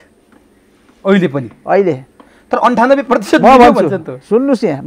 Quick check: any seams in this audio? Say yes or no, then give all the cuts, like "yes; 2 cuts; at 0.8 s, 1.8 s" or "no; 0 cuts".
no; 0 cuts